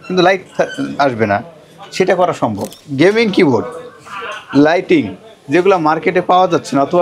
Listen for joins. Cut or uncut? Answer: cut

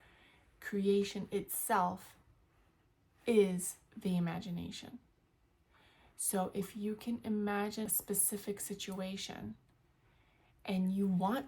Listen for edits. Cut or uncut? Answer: cut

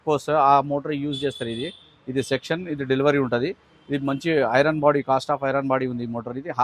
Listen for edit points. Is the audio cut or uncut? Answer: uncut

